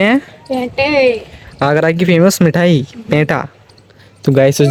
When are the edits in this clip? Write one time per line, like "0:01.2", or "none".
none